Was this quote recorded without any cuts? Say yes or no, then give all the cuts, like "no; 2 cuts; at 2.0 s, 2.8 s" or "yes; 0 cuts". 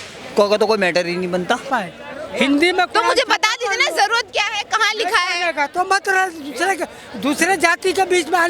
no; 1 cut; at 1.7 s